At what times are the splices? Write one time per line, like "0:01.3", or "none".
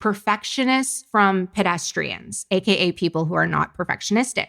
0:01.0